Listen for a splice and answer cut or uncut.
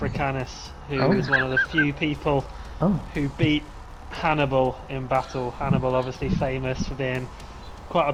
uncut